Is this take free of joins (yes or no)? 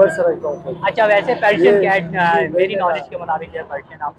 yes